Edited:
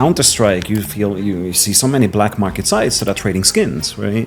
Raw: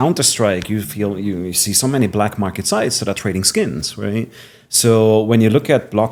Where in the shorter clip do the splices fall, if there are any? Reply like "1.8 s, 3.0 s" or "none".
none

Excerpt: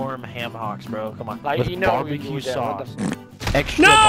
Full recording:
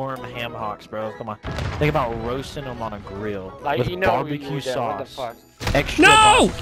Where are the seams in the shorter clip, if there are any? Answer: 1.4 s

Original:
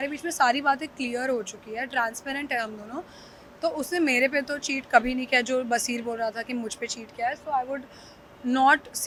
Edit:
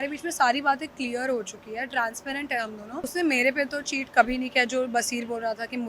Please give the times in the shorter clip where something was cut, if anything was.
3.1 s

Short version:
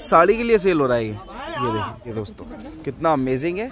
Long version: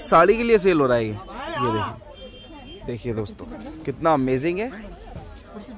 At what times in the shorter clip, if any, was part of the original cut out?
2.0 s

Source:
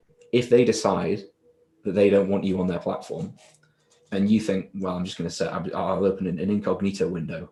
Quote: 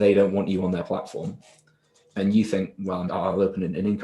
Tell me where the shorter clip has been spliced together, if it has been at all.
3.1 s

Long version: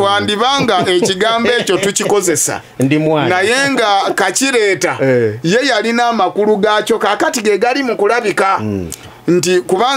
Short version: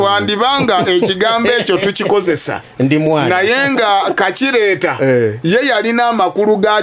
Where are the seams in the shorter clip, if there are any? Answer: none

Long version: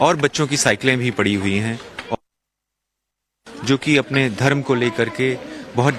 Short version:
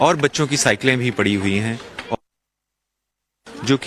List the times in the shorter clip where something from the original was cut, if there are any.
none

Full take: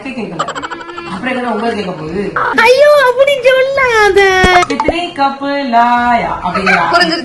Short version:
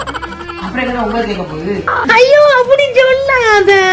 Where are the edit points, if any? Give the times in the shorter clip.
none

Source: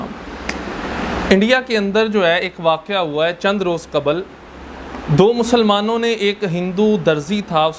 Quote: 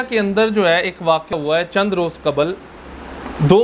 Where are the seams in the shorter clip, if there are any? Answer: 1.3 s

